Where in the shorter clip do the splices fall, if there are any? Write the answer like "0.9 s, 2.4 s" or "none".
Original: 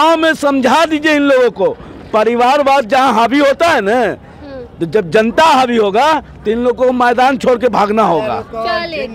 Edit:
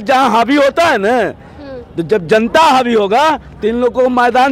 none